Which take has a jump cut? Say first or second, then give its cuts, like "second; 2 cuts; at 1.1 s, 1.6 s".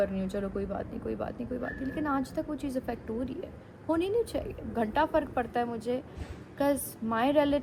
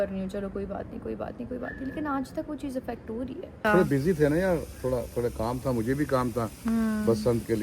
second; 1 cut; at 3.6 s